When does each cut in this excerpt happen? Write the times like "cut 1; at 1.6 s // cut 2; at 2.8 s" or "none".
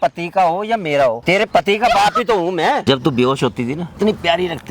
cut 1; at 1.2 s // cut 2; at 2.8 s // cut 3; at 3.9 s

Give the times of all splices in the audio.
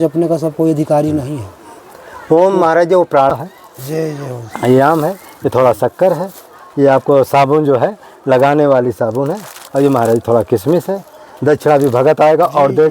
cut 1; at 3.3 s

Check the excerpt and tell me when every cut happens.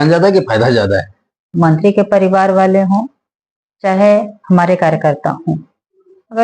cut 1; at 1.5 s

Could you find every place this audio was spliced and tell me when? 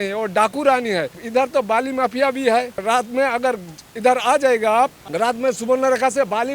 cut 1; at 1.2 s // cut 2; at 2.8 s // cut 3; at 5.0 s

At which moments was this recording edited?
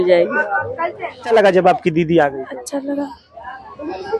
cut 1; at 1.3 s

